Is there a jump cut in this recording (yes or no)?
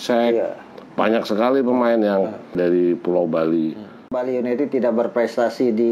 yes